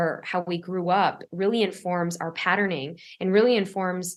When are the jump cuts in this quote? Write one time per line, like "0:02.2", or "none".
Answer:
none